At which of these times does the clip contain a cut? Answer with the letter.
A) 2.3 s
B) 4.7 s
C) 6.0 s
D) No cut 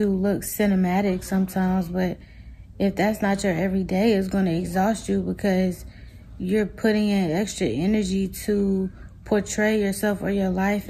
D